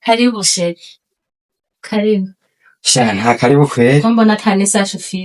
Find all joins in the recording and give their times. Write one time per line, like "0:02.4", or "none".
none